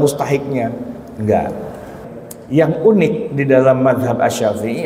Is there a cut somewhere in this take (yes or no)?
yes